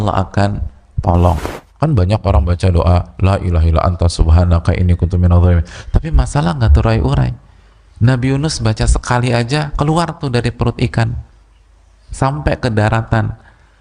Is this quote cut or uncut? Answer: cut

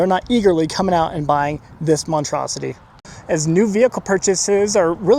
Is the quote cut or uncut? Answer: cut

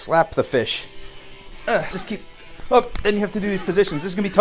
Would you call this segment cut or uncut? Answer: cut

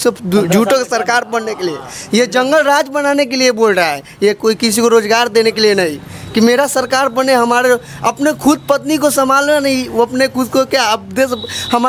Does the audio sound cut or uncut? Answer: uncut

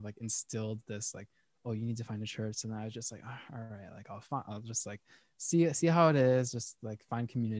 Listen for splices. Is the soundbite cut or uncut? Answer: uncut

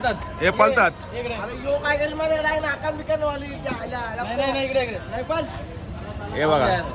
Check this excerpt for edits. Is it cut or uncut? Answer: uncut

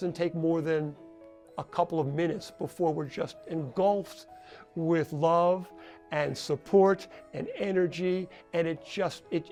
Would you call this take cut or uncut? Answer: uncut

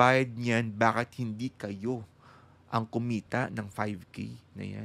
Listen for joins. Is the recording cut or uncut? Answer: uncut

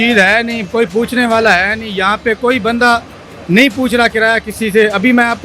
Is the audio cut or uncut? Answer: uncut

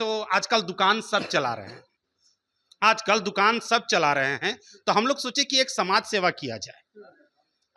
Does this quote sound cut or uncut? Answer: uncut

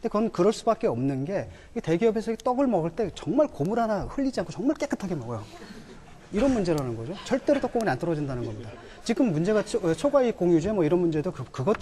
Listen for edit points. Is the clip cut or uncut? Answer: cut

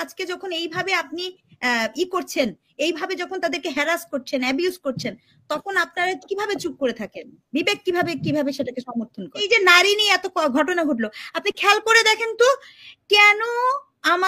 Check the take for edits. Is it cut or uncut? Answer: cut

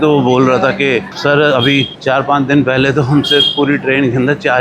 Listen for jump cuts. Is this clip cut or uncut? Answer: uncut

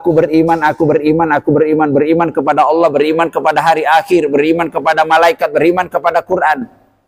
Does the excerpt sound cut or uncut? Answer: uncut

